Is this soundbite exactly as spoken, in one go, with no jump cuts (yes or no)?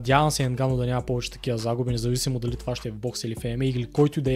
yes